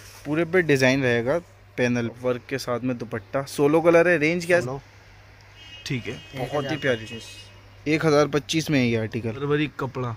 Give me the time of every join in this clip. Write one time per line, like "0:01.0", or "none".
0:02.1
0:04.6
0:09.4